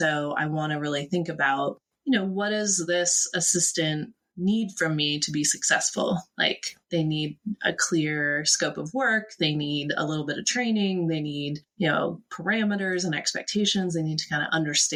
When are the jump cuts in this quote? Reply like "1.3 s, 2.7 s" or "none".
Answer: none

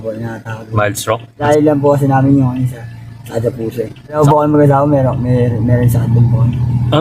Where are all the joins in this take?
1.4 s

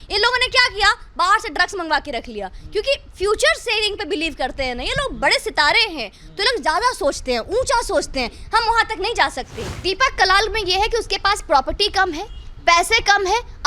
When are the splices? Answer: 9.6 s

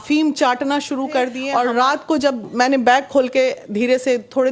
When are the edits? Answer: 1.4 s

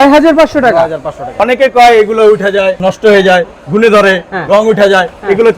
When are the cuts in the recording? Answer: 1.4 s, 2.8 s

